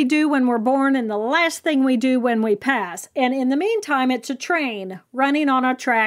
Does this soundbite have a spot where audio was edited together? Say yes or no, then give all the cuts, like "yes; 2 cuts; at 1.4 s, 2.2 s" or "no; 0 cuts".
no; 0 cuts